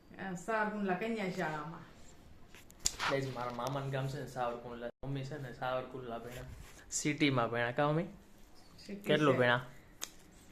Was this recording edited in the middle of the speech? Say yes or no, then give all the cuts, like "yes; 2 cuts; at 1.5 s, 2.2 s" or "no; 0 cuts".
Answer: no; 0 cuts